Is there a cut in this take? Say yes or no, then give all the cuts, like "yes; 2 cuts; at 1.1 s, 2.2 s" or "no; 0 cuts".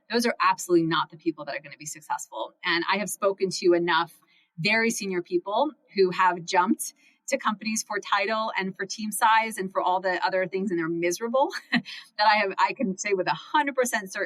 no; 0 cuts